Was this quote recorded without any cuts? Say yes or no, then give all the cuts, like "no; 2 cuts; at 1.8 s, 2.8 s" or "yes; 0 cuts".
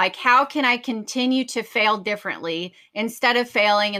yes; 0 cuts